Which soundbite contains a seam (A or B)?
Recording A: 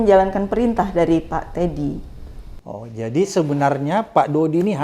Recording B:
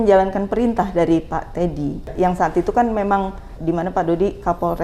B